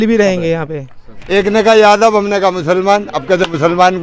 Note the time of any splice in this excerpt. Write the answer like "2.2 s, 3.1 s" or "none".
1.2 s

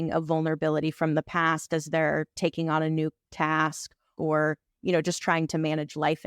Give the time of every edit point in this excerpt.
4.1 s

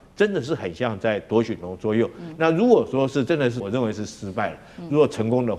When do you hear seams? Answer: 3.6 s

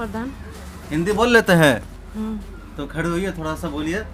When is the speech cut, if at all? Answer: none

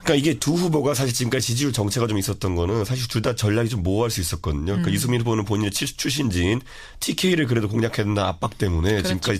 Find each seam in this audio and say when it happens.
2.6 s

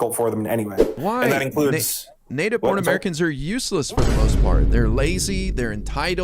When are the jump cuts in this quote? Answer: 1.0 s

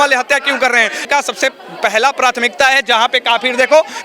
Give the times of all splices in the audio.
1.0 s

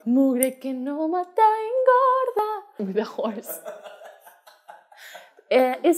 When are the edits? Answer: 2.8 s

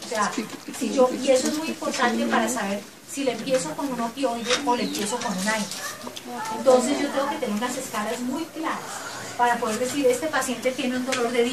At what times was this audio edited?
7.5 s

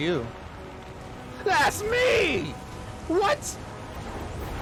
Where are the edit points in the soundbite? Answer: none

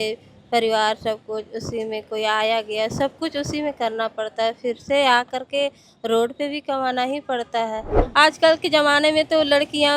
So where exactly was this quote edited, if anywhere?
8.0 s

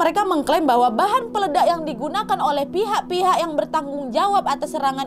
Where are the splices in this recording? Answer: none

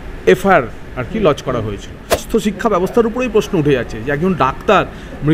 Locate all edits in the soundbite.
2.2 s

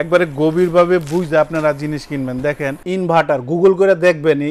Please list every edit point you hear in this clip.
2.8 s

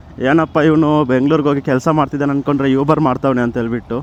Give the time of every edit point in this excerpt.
none

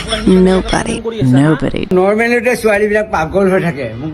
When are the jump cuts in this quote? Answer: 1.9 s

